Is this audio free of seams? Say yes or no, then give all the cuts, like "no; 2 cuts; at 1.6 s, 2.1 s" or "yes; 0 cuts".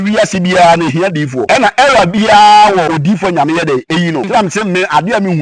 no; 3 cuts; at 1.4 s, 2.9 s, 4.3 s